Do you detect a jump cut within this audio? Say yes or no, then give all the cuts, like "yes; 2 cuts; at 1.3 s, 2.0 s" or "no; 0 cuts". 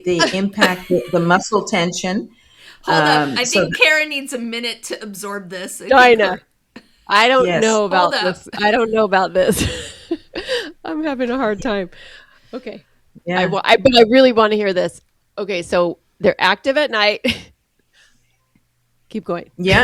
no; 0 cuts